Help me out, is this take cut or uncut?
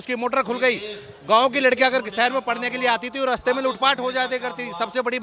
uncut